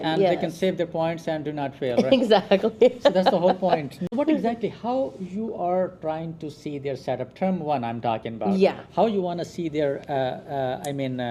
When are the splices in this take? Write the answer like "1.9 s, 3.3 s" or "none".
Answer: none